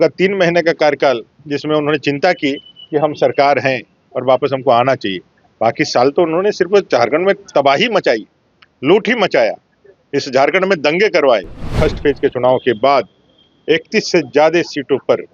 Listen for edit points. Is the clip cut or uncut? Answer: cut